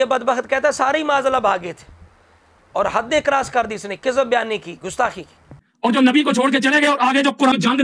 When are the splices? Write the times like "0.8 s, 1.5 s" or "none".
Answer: 2.2 s, 5.6 s